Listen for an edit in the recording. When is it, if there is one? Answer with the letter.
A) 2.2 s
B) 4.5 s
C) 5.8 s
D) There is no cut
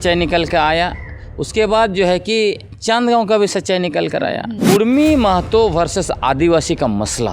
B